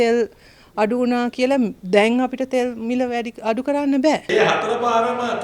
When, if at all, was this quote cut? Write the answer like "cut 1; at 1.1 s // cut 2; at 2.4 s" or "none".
cut 1; at 4.2 s